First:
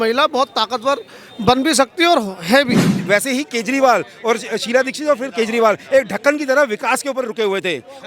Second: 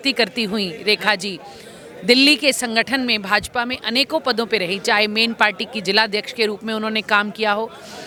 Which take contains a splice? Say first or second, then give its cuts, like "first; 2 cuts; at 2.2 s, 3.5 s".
first; 1 cut; at 3.0 s